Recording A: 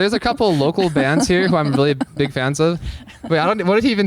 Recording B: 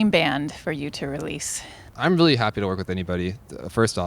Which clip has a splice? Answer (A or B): B